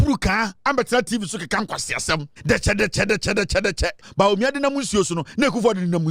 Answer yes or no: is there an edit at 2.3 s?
yes